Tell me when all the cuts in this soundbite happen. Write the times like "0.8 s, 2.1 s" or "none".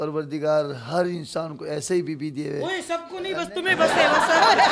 none